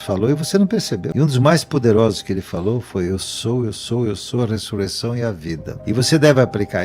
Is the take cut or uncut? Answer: cut